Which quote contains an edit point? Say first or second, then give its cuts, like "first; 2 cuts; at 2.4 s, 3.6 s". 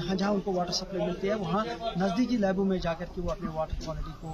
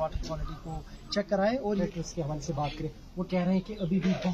second; 1 cut; at 1.8 s